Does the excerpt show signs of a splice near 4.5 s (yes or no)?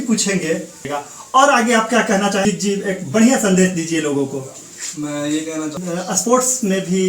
no